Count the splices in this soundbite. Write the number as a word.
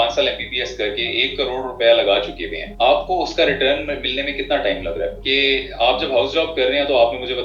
zero